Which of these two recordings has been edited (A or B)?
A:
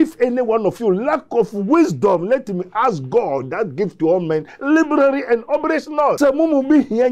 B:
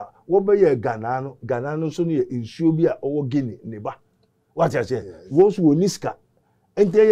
A